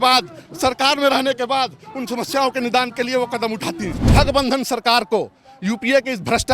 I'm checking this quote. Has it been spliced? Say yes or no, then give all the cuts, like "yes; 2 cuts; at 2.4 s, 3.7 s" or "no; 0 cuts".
yes; 1 cut; at 4.0 s